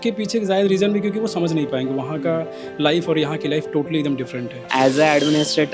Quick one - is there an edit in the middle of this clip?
yes; 1 cut; at 4.7 s

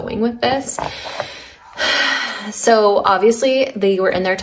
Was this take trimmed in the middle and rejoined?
no; 0 cuts

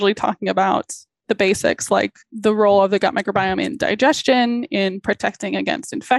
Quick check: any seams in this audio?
yes; 2 cuts; at 1.2 s, 2.2 s

